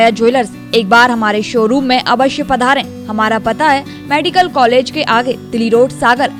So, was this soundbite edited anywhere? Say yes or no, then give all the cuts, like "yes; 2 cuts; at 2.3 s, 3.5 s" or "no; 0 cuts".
no; 0 cuts